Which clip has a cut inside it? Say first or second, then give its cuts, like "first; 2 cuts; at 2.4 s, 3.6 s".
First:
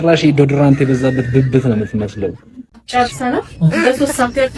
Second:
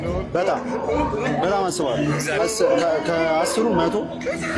first; 1 cut; at 2.7 s